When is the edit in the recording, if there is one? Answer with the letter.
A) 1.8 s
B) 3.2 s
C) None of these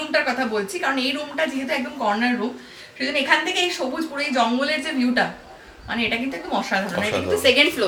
C